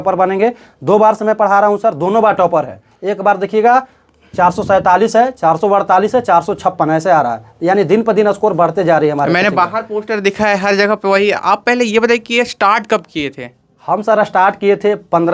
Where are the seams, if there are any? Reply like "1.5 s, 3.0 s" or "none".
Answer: none